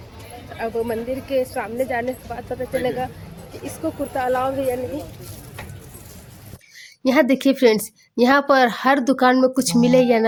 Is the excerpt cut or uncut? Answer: uncut